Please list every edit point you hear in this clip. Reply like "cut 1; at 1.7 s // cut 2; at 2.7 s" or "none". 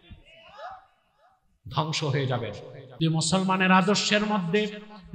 cut 1; at 3.0 s